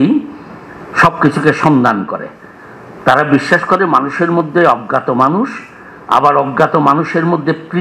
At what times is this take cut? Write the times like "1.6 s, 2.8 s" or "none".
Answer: none